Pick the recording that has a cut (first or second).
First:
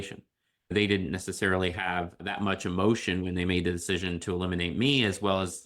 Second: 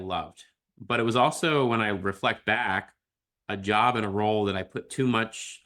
first